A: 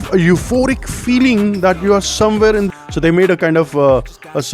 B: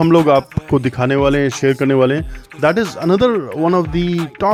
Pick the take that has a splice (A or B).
A